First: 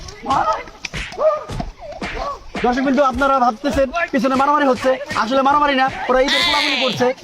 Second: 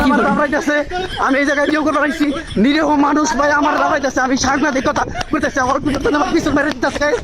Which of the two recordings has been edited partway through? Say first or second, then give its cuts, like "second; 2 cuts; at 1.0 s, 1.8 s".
second; 1 cut; at 1.7 s